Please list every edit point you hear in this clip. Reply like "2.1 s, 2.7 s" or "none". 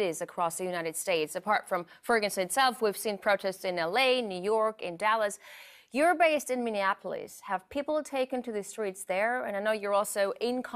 3.6 s